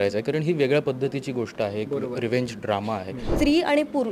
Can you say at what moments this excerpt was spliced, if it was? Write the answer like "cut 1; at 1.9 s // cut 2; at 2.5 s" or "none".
cut 1; at 3.2 s